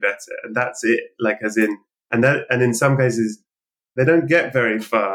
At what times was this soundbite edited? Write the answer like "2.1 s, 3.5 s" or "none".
none